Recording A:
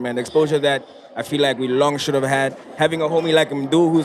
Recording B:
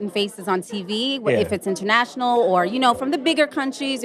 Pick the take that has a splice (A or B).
A